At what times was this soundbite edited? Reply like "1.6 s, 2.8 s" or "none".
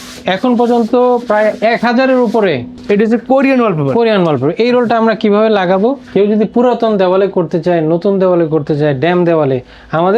2.7 s, 6.0 s